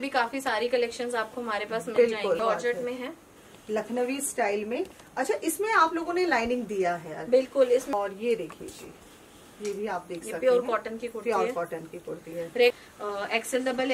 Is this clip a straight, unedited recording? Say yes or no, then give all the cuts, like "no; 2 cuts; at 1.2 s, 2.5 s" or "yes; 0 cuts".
no; 3 cuts; at 2.4 s, 7.9 s, 12.7 s